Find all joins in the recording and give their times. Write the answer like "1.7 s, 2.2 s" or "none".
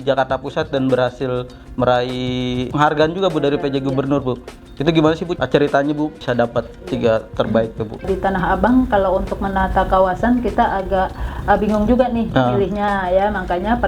2.7 s, 5.3 s, 6.2 s, 8.0 s